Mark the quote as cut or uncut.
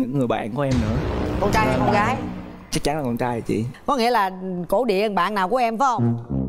uncut